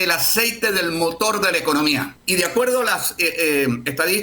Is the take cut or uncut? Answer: cut